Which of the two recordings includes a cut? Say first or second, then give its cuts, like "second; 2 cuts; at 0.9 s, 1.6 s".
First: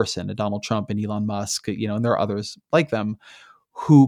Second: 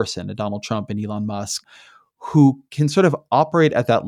second; 1 cut; at 1.6 s